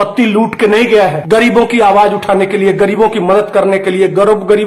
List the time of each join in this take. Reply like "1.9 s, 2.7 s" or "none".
1.2 s